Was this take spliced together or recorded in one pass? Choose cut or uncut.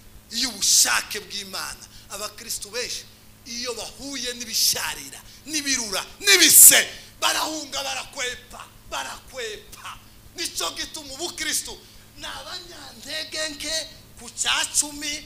uncut